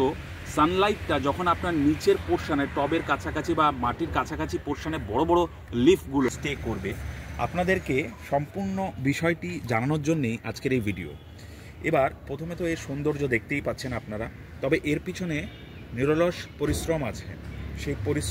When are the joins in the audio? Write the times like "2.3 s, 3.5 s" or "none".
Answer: 6.3 s